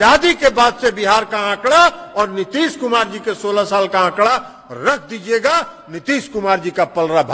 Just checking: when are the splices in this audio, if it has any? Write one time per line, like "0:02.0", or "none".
none